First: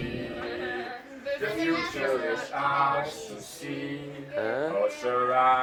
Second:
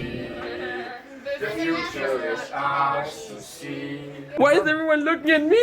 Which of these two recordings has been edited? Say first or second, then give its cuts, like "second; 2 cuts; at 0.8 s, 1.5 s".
second; 1 cut; at 4.4 s